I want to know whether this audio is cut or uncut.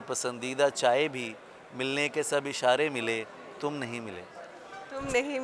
uncut